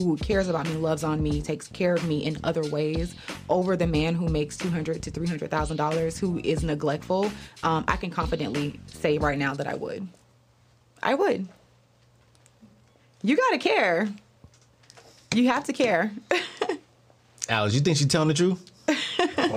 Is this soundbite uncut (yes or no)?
yes